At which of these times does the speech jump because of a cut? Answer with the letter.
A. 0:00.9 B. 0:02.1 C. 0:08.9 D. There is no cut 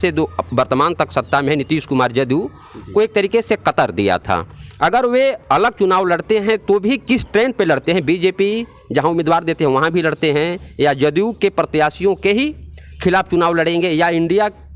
D